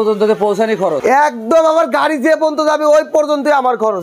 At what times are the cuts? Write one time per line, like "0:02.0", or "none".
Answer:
0:01.0